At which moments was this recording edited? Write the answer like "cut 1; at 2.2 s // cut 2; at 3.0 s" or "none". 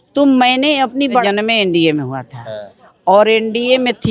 cut 1; at 1.2 s